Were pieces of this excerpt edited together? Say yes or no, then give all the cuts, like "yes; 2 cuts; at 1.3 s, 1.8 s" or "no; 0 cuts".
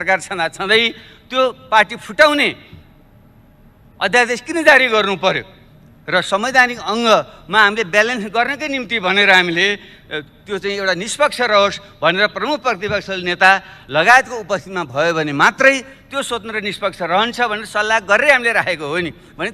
no; 0 cuts